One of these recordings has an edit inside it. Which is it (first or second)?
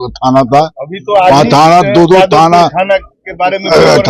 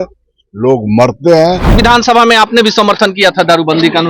second